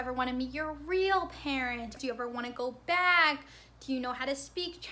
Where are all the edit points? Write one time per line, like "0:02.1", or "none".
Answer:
0:01.9